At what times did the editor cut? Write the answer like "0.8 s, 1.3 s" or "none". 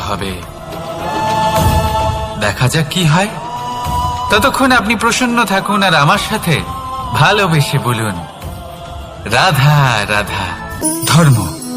10.8 s